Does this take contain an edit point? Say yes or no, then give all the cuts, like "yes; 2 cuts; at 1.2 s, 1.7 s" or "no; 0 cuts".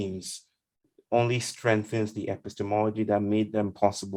no; 0 cuts